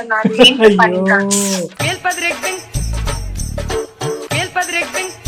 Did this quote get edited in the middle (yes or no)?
yes